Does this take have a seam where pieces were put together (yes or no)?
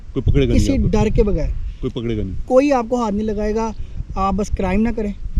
no